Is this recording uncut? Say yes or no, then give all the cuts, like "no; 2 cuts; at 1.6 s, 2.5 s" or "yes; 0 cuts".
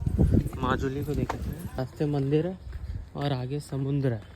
no; 1 cut; at 1.8 s